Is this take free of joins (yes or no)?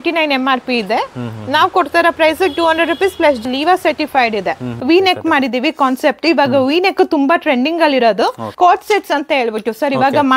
no